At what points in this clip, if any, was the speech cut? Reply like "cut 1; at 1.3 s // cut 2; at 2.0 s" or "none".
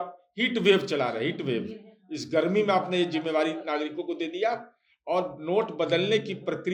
none